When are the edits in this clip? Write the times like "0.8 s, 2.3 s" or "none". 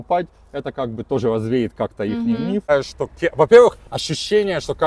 2.7 s

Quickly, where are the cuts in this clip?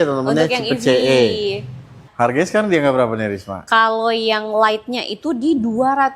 2.0 s

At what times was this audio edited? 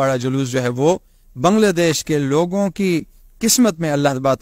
none

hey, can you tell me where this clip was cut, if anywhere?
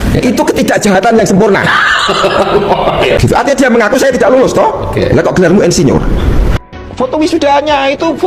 3.2 s, 6.6 s

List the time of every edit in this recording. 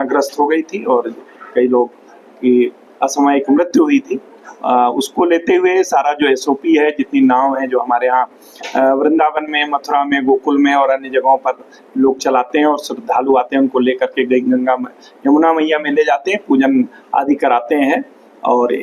none

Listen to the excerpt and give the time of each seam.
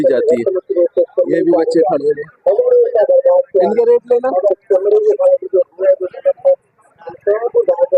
none

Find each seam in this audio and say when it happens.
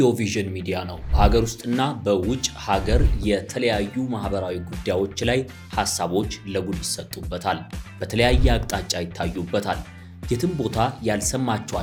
none

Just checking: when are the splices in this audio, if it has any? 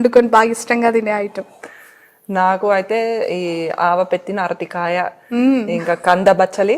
none

